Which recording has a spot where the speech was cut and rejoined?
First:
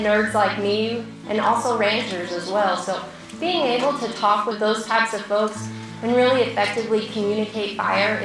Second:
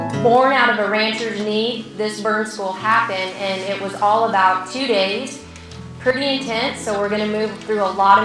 first; 2 cuts; at 1.1 s, 4.6 s

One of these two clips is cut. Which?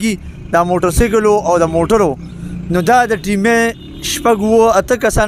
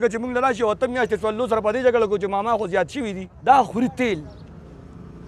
second; 1 cut; at 3.3 s

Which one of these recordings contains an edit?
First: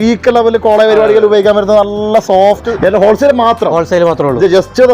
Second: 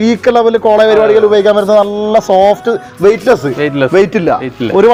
first; 1 cut; at 2.7 s

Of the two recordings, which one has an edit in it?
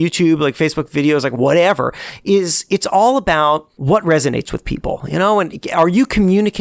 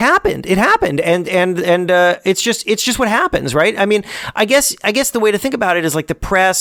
first; 1 cut; at 3.7 s

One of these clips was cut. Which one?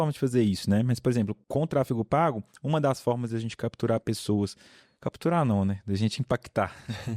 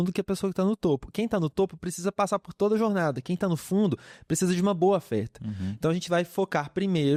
first; 1 cut; at 1.4 s

